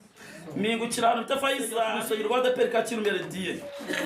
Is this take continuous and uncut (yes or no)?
no